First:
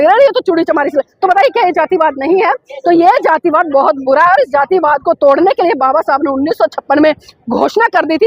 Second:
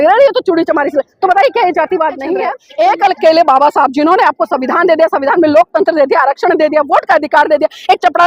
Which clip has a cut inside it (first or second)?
second